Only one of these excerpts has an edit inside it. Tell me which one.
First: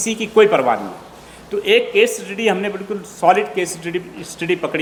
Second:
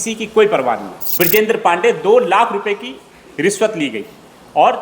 second; 1 cut; at 1.0 s

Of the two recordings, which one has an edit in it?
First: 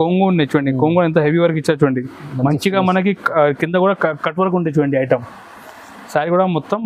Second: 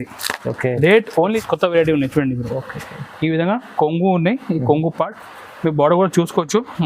second; 1 cut; at 1.4 s

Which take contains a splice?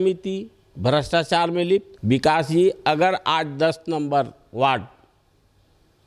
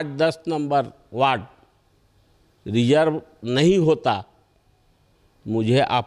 first; 1 cut; at 1.9 s

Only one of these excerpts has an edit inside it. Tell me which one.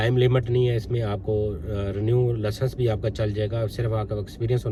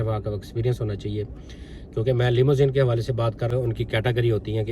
second; 1 cut; at 3.5 s

